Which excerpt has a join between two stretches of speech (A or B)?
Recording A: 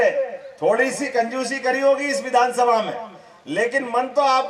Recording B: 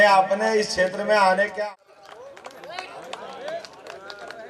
B